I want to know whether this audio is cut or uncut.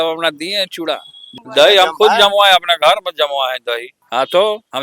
cut